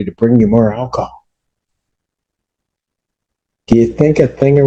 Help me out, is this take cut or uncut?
uncut